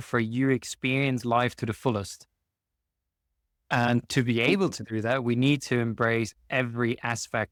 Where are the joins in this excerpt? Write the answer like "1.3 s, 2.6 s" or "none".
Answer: none